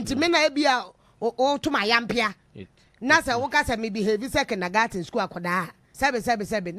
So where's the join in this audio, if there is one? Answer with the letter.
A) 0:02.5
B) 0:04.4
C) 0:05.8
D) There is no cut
C